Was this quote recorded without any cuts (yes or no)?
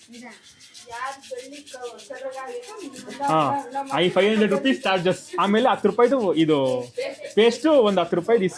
yes